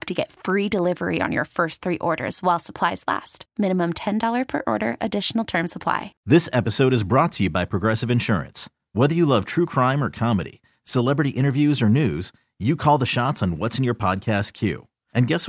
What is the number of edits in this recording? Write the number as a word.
one